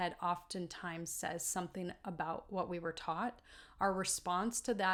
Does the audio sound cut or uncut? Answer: uncut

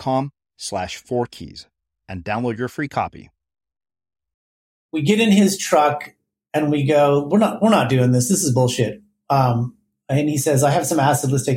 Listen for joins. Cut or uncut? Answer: cut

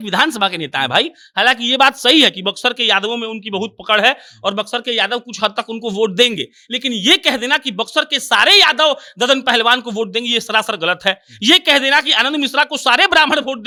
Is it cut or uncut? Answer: uncut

